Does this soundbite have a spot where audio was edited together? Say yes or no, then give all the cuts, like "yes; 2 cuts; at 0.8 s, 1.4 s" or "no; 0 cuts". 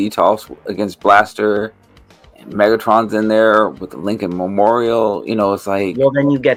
no; 0 cuts